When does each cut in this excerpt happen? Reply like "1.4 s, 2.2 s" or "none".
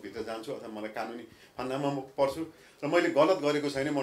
none